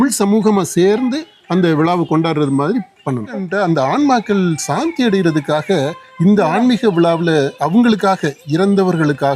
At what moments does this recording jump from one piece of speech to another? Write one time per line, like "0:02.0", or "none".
0:03.5